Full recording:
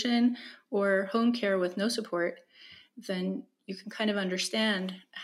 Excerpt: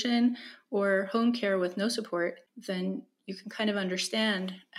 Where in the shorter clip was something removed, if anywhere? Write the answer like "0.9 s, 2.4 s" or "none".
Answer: 2.5 s